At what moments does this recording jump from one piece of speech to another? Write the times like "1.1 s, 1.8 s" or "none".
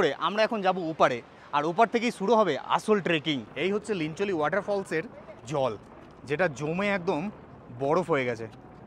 3.5 s